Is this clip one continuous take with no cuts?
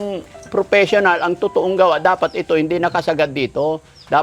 yes; 0 cuts

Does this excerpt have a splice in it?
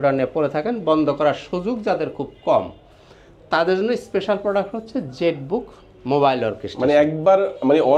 no; 0 cuts

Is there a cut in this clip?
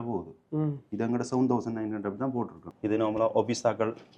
yes; 1 cut; at 2.6 s

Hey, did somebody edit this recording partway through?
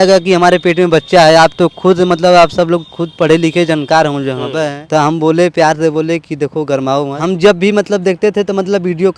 yes; 2 cuts; at 4.8 s, 7.2 s

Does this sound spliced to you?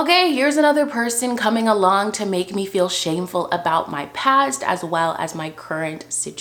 no; 0 cuts

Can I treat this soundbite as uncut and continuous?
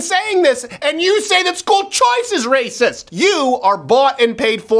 no; 1 cut; at 3.0 s

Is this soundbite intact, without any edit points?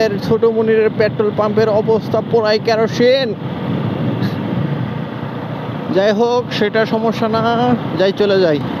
yes; 0 cuts

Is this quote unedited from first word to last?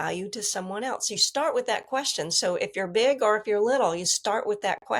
yes; 0 cuts

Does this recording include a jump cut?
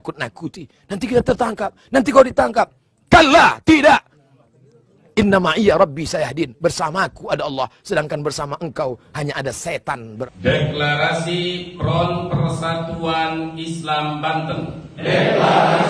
yes; 1 cut; at 10.2 s

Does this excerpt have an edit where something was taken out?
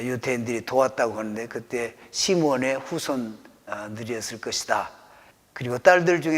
yes; 1 cut; at 5.1 s

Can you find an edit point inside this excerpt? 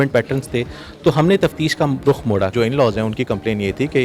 yes; 1 cut; at 2.5 s

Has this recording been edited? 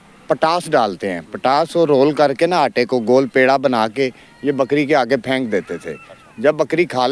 no; 0 cuts

